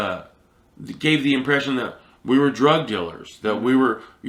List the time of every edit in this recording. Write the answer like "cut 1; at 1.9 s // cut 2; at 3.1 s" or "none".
none